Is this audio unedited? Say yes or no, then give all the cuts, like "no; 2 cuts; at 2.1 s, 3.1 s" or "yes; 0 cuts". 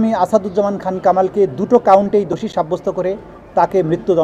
yes; 0 cuts